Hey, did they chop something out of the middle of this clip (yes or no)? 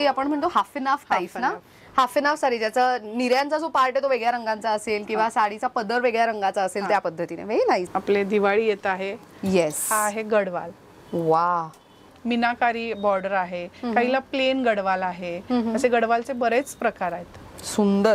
yes